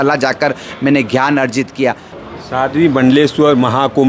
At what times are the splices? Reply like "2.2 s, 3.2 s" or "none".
2.1 s

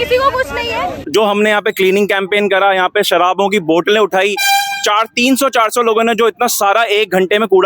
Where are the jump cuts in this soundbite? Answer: 1.0 s

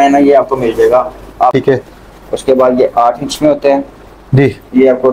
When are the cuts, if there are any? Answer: 1.5 s

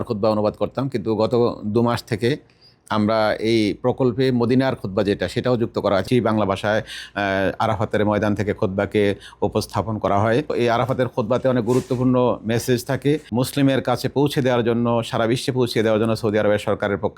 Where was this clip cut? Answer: 6.0 s, 10.5 s, 13.3 s

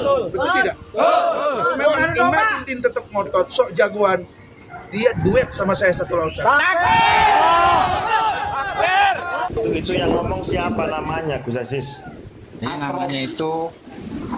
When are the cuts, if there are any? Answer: 9.4 s

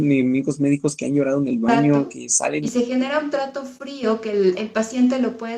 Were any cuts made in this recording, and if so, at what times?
2.7 s

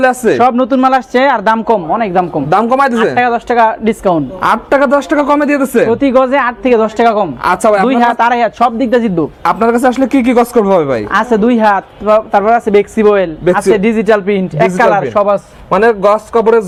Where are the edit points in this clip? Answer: none

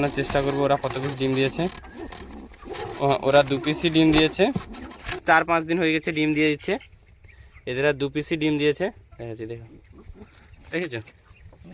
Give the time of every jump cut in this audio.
5.2 s

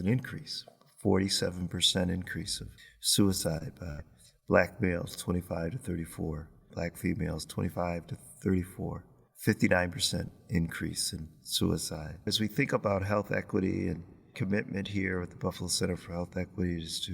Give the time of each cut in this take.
6.7 s, 12.3 s

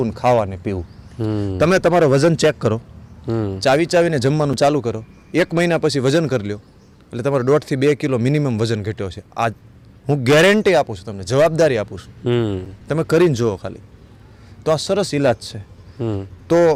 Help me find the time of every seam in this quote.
none

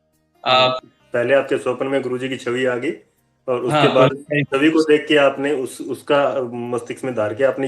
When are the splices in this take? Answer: 0.9 s

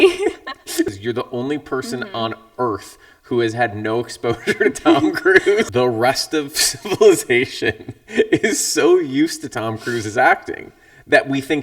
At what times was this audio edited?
0.9 s, 5.7 s

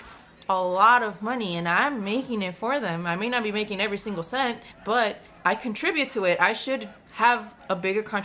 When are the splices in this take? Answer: 4.7 s, 5.3 s, 7.0 s

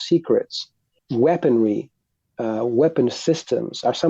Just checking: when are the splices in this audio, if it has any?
1.0 s

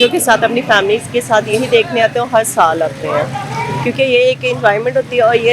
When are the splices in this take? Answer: none

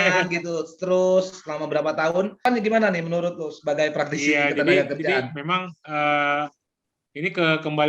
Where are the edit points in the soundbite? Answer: 2.4 s

